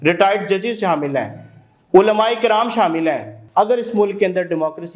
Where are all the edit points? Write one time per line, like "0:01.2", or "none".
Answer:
0:03.3